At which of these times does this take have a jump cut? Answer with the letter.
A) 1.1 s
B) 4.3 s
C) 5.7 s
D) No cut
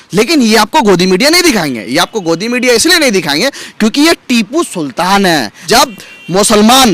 C